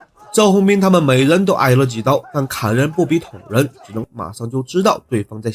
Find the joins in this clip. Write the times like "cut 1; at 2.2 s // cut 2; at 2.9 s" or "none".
cut 1; at 4.1 s